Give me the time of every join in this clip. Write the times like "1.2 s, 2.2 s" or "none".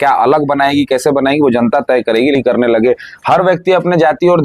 2.4 s